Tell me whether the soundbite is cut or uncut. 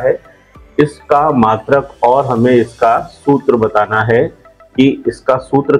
uncut